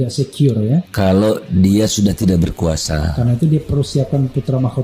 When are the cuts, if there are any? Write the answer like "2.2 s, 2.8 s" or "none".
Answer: 0.9 s